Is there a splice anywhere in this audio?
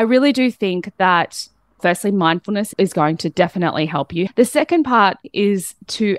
yes; 2 cuts; at 4.3 s, 5.2 s

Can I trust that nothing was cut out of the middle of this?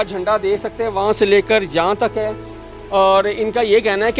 yes; 0 cuts

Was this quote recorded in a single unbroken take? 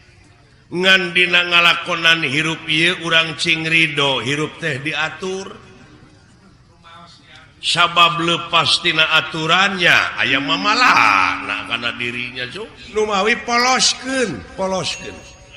no; 1 cut; at 12.9 s

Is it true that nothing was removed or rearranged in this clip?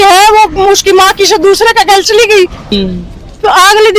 no; 1 cut; at 2.6 s

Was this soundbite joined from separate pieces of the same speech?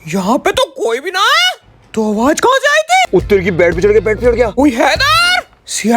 yes; 2 cuts; at 3.1 s, 4.5 s

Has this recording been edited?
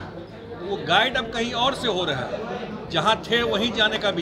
no; 0 cuts

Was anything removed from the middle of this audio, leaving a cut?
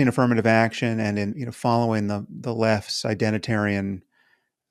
yes; 1 cut; at 1.4 s

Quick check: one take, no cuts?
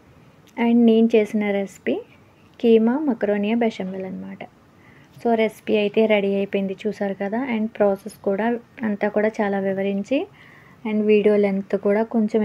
yes; 0 cuts

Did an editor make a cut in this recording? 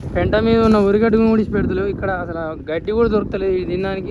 no; 0 cuts

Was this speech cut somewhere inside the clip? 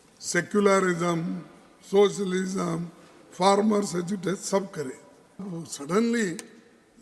yes; 1 cut; at 5.5 s

